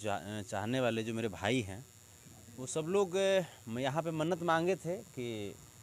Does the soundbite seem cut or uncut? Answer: uncut